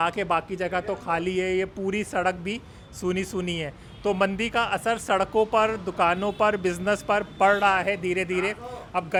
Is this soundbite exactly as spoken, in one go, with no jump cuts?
yes; 0 cuts

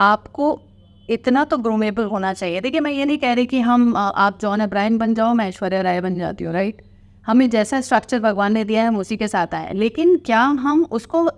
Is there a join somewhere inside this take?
no; 0 cuts

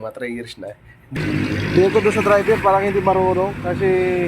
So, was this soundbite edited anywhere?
yes; 1 cut; at 1.1 s

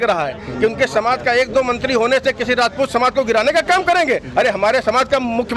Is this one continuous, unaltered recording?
yes; 0 cuts

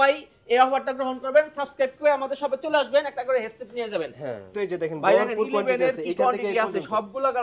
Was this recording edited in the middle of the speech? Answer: yes; 1 cut; at 4.5 s

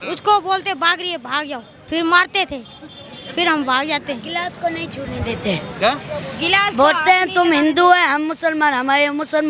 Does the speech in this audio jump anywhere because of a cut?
no; 0 cuts

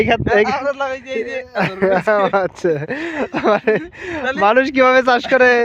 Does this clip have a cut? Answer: no; 0 cuts

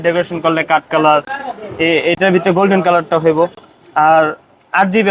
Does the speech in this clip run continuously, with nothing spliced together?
yes; 0 cuts

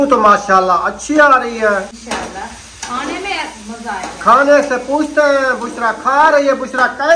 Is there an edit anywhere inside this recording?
yes; 1 cut; at 2.0 s

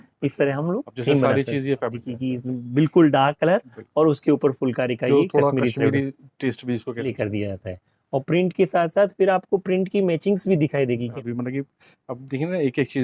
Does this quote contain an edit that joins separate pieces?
yes; 3 cuts; at 2.0 s, 7.1 s, 11.2 s

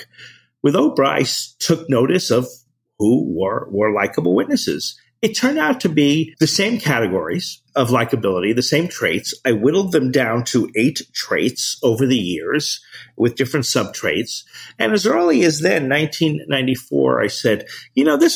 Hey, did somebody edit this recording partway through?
yes; 2 cuts; at 6.3 s, 7.6 s

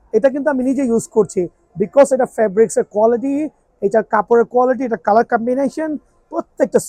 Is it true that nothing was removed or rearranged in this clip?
yes; 0 cuts

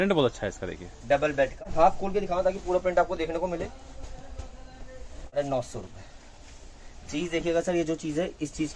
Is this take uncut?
no; 2 cuts; at 1.6 s, 5.3 s

